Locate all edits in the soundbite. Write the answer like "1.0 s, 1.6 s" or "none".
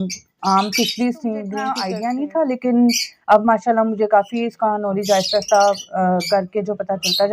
1.8 s

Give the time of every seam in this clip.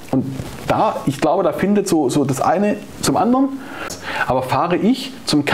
3.9 s

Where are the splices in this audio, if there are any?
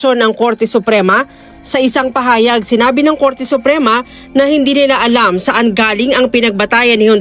4.1 s

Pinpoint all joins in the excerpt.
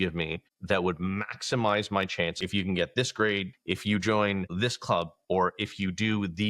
2.4 s, 3.5 s

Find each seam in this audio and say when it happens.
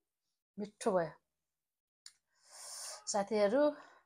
none

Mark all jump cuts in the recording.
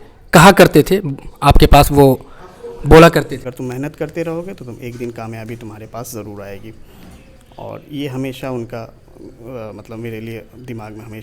3.4 s

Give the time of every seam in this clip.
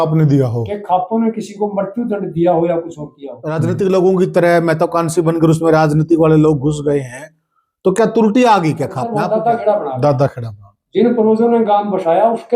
3.3 s, 9.3 s

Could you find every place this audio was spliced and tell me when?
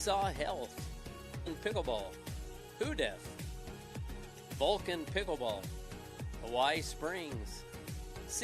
1.5 s

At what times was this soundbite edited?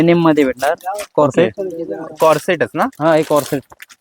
none

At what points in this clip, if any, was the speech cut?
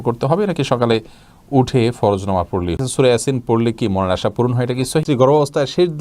2.8 s, 5.0 s

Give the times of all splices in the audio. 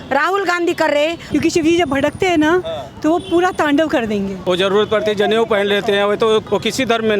1.2 s, 4.3 s, 6.5 s

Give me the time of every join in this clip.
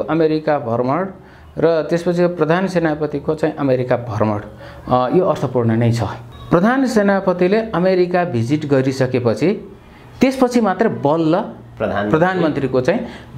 6.3 s

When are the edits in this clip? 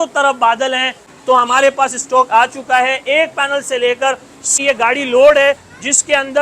1.1 s, 4.5 s

